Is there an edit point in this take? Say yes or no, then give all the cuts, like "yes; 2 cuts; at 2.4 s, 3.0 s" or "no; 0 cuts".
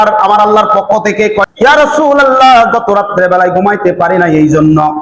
yes; 1 cut; at 1.5 s